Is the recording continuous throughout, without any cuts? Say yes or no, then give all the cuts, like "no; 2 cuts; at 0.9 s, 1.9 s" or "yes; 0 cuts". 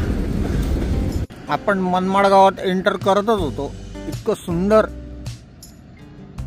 no; 1 cut; at 1.2 s